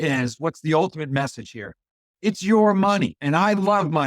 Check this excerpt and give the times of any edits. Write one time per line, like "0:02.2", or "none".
0:03.2